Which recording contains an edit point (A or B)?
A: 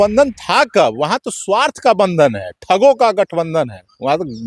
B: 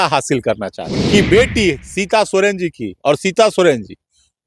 B